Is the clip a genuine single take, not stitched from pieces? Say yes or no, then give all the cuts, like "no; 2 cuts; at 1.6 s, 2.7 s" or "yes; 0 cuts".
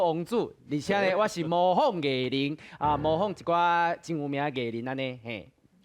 yes; 0 cuts